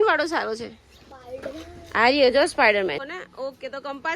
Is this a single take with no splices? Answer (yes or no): no